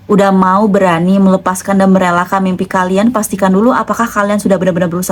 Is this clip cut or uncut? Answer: uncut